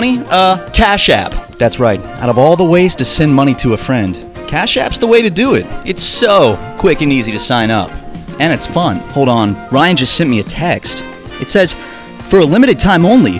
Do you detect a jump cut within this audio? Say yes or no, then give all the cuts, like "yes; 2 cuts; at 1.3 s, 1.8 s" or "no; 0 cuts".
yes; 2 cuts; at 5.7 s, 9.1 s